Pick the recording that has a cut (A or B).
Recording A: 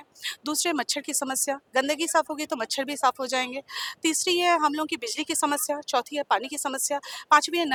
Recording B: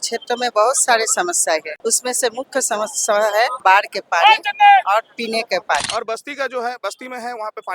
B